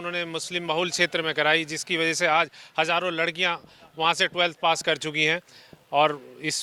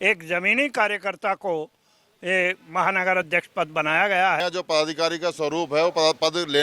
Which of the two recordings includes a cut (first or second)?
second